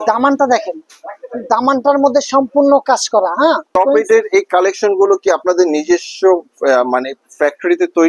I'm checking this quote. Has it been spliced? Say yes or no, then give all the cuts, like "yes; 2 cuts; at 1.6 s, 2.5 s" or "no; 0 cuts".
yes; 1 cut; at 3.7 s